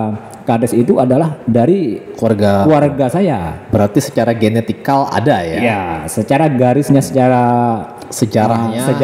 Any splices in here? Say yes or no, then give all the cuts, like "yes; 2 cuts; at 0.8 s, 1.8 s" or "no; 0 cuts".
no; 0 cuts